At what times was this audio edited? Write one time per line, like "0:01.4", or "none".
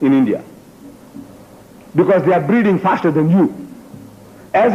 none